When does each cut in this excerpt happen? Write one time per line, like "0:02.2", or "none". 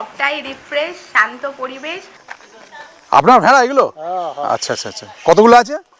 0:02.4